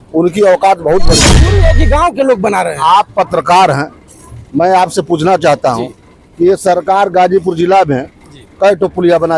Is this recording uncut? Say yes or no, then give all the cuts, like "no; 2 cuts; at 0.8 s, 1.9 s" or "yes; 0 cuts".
no; 1 cut; at 1.4 s